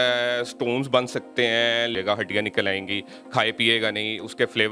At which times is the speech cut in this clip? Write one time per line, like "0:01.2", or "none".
0:01.9

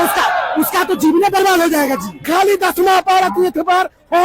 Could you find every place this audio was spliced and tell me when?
0:02.1

